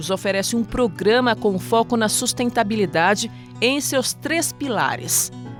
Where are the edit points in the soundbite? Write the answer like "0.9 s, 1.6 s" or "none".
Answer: none